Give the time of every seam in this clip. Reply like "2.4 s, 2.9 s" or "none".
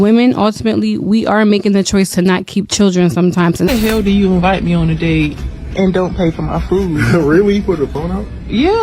3.7 s